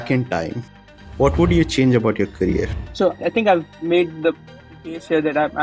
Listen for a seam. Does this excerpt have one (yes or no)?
yes